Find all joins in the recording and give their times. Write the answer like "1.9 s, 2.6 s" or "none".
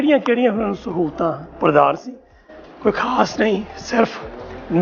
none